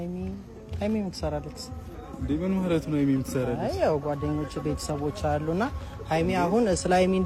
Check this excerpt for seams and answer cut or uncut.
uncut